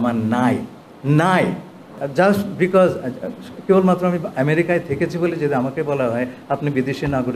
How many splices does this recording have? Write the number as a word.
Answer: one